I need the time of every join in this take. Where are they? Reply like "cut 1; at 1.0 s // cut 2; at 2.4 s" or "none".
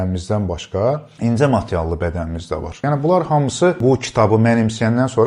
cut 1; at 1.1 s // cut 2; at 2.8 s // cut 3; at 3.8 s